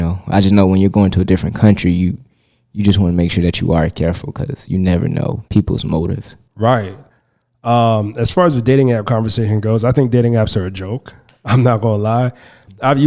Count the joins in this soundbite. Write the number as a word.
one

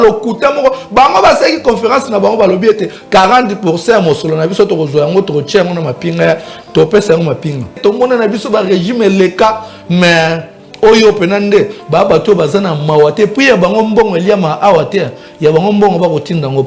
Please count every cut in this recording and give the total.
one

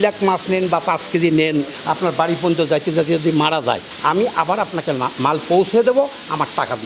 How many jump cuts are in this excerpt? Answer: zero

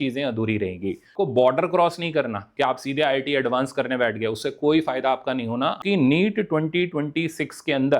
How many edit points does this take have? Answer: two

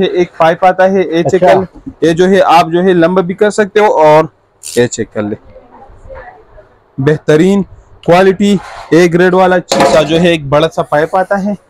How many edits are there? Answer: one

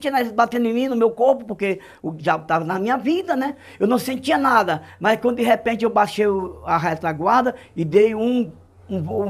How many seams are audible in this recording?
zero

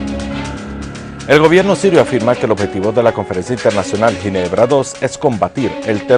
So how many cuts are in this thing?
zero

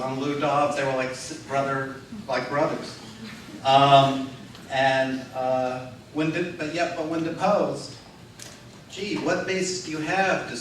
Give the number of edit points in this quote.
one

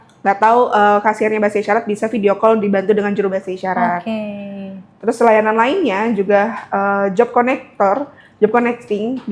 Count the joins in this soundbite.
zero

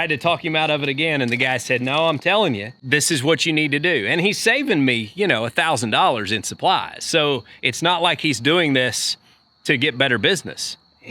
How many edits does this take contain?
one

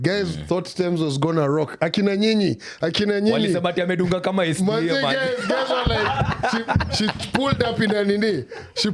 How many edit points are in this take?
zero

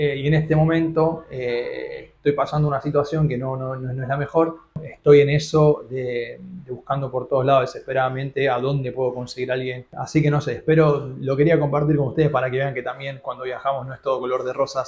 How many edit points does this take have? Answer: two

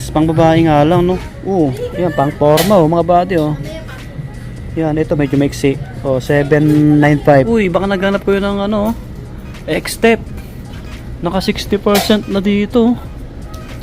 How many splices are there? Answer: two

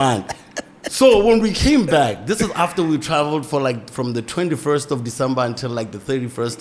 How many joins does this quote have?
zero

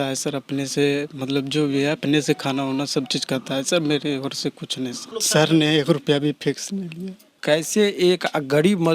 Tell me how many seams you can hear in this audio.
two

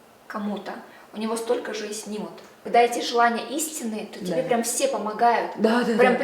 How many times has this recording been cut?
one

